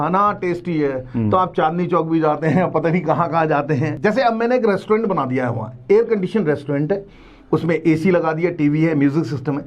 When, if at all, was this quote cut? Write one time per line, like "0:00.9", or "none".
0:03.9